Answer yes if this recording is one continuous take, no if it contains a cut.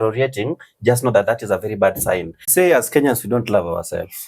no